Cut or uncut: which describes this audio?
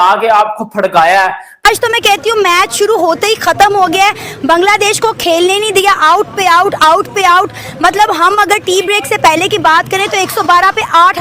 cut